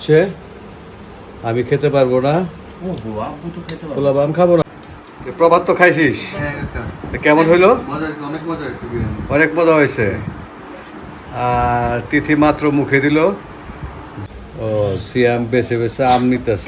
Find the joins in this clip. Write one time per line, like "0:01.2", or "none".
0:04.6
0:14.2